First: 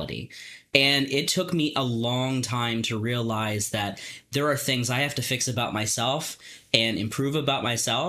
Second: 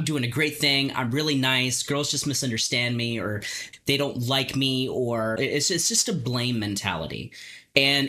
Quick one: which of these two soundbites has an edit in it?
second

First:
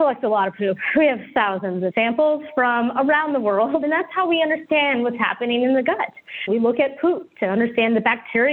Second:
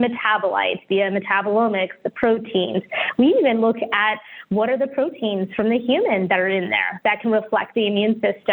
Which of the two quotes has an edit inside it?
first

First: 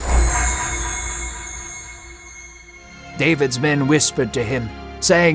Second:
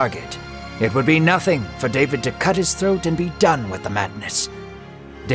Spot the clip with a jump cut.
first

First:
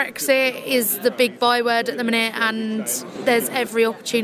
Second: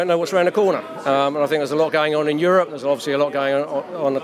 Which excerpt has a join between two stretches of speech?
first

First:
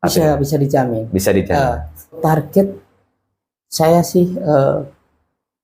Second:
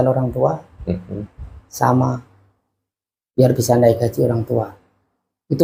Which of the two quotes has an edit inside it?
first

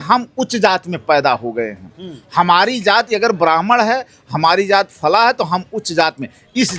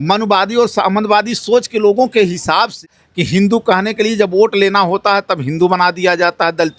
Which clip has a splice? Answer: second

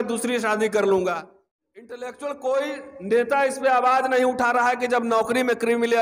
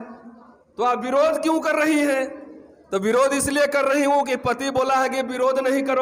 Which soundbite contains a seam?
first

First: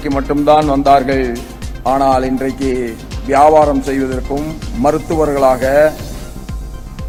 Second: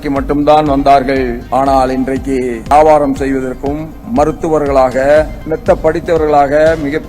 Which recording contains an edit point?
second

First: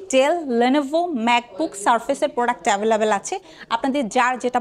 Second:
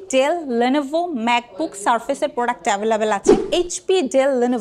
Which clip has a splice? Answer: second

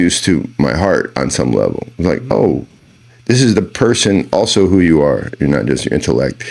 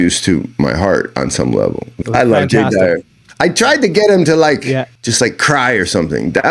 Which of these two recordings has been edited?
second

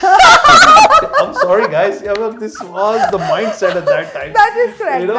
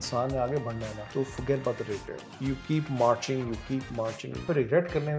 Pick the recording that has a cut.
second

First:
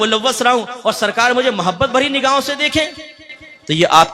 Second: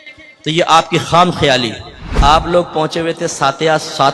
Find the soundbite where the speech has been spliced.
second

